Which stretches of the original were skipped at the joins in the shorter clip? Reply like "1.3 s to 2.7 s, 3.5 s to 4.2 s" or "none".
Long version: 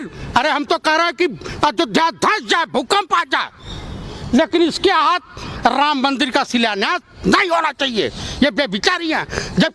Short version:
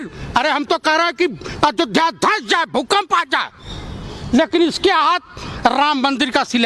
none